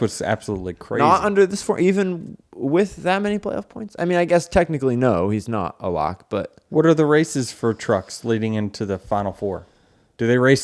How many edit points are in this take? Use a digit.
0